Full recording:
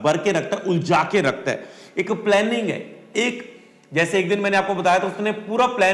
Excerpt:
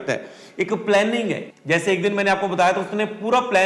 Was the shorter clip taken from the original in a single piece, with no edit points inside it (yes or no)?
no